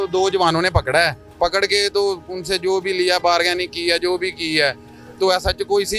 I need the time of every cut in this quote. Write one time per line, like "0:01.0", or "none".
none